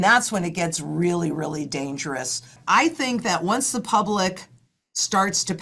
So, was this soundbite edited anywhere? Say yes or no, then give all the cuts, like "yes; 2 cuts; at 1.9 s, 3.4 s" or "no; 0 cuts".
yes; 1 cut; at 2.6 s